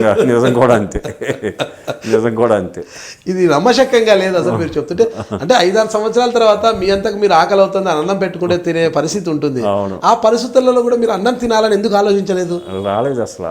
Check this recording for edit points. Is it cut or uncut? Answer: uncut